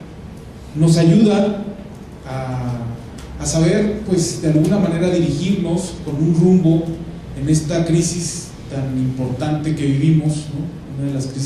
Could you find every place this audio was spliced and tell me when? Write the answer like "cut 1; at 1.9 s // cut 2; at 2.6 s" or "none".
cut 1; at 4.4 s